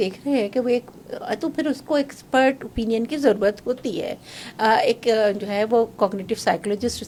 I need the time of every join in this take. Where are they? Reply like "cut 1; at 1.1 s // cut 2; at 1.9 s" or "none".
none

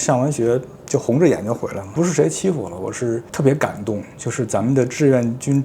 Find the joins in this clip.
cut 1; at 1.9 s

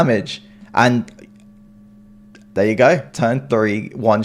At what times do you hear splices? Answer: cut 1; at 3.1 s

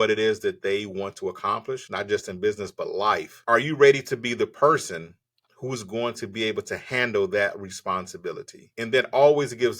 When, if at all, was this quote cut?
cut 1; at 3.3 s

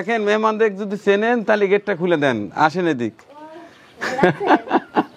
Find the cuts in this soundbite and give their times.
none

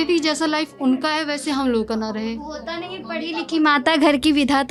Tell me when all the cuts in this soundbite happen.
none

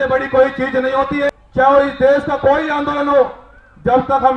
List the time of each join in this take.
cut 1; at 1.3 s

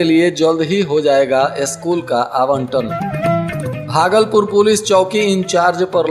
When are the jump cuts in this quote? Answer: none

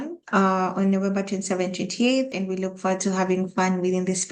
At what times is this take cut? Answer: cut 1; at 2.3 s

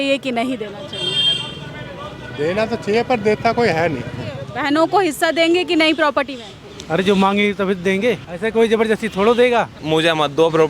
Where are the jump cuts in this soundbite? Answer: cut 1; at 4.5 s // cut 2; at 8.3 s // cut 3; at 9.8 s

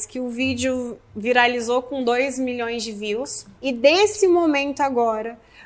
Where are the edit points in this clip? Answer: cut 1; at 3.4 s

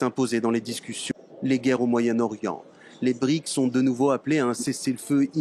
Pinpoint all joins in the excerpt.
cut 1; at 1.0 s

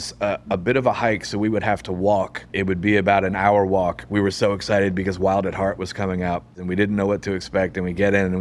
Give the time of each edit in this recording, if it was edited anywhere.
cut 1; at 2.5 s // cut 2; at 4.1 s // cut 3; at 6.5 s

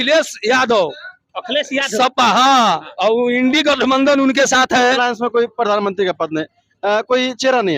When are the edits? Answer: cut 1; at 5.0 s

